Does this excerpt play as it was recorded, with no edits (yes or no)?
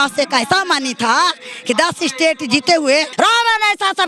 no